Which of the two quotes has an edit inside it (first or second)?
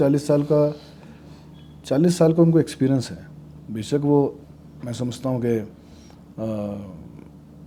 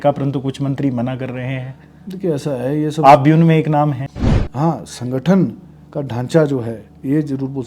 second